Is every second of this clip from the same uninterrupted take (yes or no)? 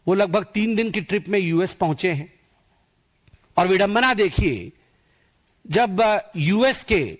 yes